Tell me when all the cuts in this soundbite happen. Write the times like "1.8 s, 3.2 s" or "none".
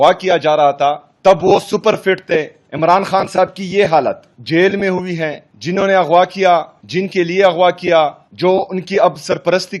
1.1 s, 2.6 s, 4.3 s, 5.5 s, 6.8 s, 8.2 s